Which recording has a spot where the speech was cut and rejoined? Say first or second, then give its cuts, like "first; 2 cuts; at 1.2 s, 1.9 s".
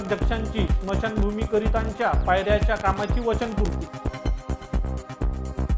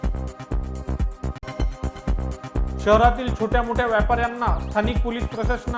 second; 1 cut; at 1.3 s